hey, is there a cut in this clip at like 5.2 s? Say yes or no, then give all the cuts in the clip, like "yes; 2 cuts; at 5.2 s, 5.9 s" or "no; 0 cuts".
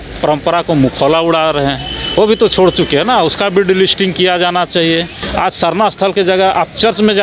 yes; 1 cut; at 5.2 s